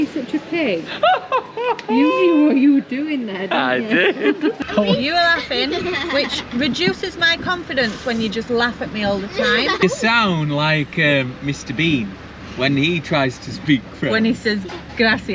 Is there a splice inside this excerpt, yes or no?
yes